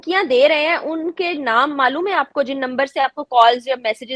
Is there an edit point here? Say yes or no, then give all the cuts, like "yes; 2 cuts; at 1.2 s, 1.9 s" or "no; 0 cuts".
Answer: no; 0 cuts